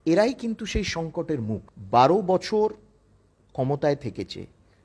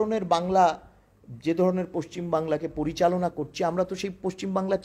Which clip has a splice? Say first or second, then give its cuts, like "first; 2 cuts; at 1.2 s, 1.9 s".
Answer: first; 1 cut; at 1.7 s